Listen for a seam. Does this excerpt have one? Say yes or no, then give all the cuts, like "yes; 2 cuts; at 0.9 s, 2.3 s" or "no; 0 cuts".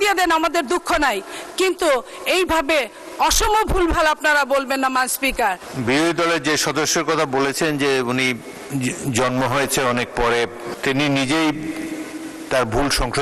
yes; 3 cuts; at 5.7 s, 8.6 s, 10.7 s